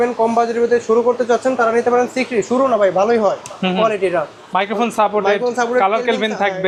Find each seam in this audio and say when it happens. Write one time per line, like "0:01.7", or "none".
none